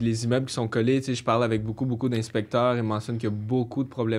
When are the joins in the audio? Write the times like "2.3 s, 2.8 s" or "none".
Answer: none